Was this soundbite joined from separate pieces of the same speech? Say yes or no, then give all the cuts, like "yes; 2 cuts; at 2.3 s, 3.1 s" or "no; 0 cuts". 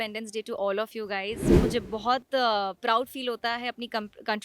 yes; 1 cut; at 1.5 s